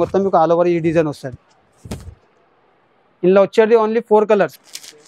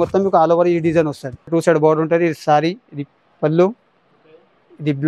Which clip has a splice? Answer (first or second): second